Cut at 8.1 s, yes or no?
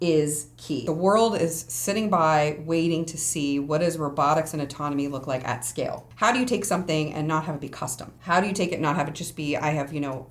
yes